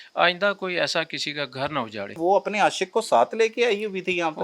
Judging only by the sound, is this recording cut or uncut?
cut